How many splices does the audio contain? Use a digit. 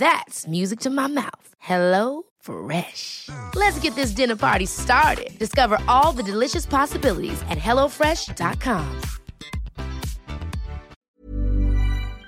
1